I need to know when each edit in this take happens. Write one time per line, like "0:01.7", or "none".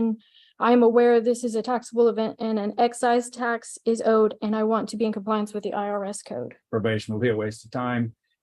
0:06.6